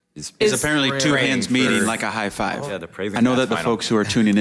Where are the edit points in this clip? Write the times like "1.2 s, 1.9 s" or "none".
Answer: 2.6 s